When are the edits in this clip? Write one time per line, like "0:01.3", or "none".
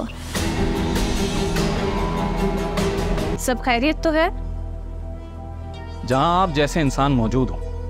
none